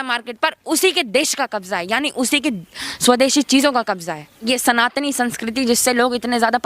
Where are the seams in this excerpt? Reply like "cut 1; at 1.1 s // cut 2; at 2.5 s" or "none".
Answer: cut 1; at 4.5 s